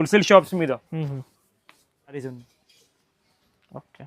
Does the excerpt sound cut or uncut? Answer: cut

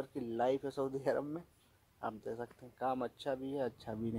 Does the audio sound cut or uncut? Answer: uncut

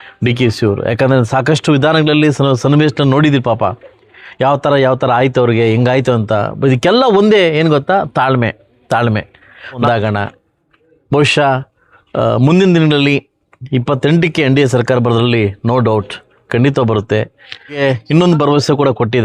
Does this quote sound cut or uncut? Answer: cut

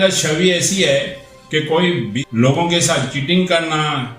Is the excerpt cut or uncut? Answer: cut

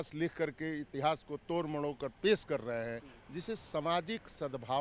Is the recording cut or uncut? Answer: uncut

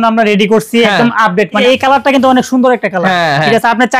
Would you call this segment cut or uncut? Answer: cut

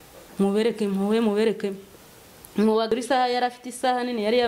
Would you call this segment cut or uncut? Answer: cut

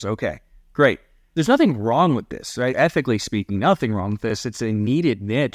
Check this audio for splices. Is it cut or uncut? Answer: cut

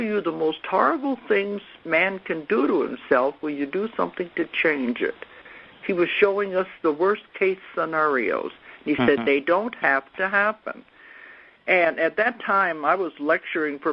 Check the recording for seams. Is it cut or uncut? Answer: cut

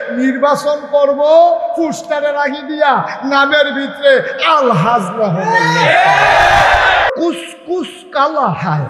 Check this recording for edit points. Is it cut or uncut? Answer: cut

